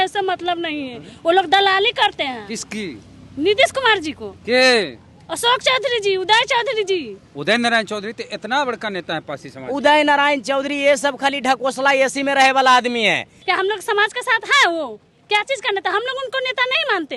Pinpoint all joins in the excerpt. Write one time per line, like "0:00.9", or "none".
0:07.3
0:13.3